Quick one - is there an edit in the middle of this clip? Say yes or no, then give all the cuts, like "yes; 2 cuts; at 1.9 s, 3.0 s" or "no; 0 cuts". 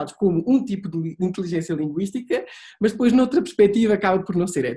no; 0 cuts